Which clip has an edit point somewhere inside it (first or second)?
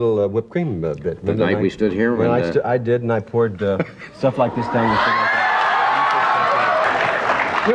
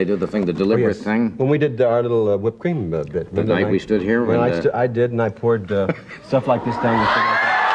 first